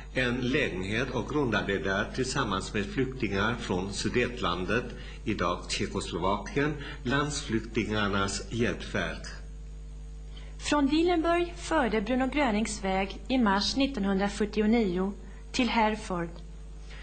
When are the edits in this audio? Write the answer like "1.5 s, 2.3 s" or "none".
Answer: none